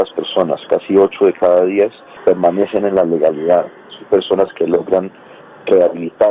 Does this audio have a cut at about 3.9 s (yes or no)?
no